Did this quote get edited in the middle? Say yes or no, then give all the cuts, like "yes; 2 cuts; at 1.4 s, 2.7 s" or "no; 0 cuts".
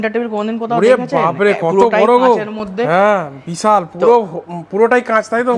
no; 0 cuts